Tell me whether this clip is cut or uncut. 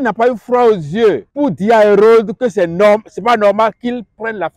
cut